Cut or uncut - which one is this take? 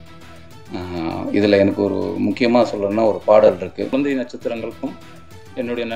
cut